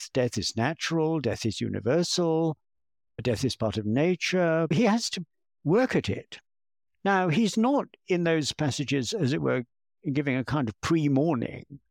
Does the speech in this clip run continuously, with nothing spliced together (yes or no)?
no